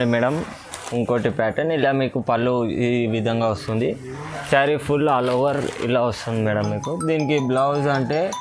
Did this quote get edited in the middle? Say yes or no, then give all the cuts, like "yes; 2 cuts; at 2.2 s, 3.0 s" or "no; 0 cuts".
no; 0 cuts